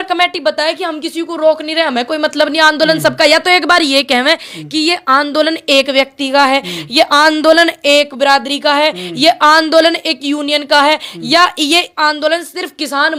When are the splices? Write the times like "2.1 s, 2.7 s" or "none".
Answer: none

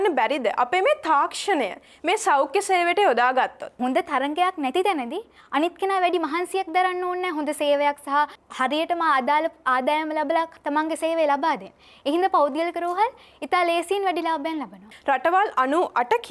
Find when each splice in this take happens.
3.8 s, 8.4 s, 14.9 s

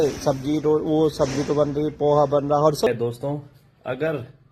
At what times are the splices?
2.9 s

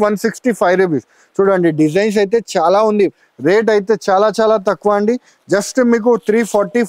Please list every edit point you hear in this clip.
3.2 s

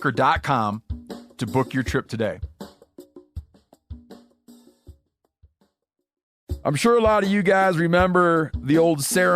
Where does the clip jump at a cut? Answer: 6.4 s

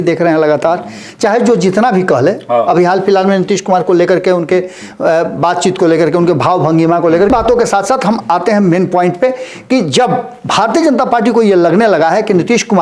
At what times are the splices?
7.3 s

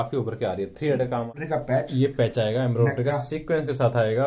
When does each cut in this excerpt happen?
1.3 s

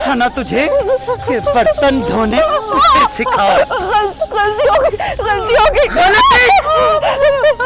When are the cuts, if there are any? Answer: none

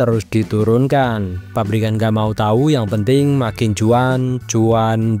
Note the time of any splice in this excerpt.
none

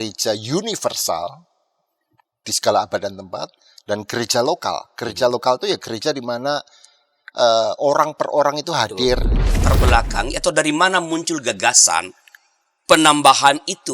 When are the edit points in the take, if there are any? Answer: 9.6 s

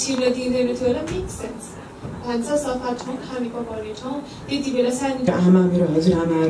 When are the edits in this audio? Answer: 5.3 s

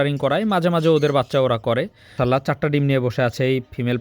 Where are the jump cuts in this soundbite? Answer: 2.1 s

